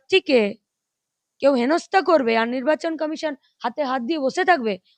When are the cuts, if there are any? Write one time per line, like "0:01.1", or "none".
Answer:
none